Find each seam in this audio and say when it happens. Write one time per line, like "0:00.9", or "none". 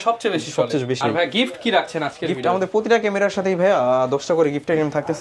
0:01.0